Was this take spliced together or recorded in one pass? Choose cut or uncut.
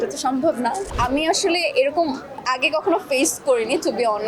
cut